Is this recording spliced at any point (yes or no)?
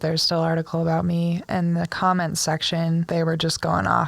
yes